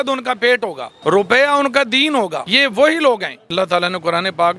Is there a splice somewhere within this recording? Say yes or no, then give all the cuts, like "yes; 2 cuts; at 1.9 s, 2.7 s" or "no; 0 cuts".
yes; 3 cuts; at 0.9 s, 2.4 s, 3.5 s